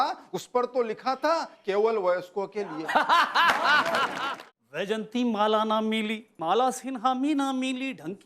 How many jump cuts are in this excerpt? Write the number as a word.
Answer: one